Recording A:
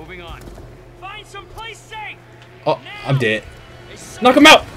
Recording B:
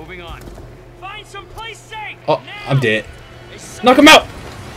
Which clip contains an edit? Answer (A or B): B